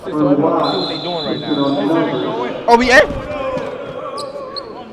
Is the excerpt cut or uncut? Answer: uncut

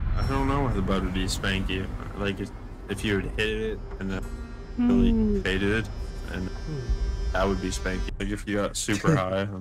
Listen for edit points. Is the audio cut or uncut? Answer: cut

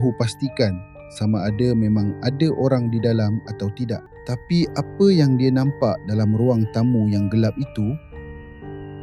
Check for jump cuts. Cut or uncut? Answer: cut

